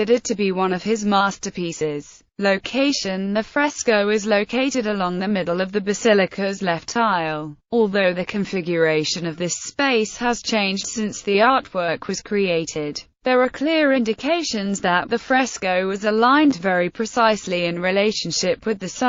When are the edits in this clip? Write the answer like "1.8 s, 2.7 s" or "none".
15.0 s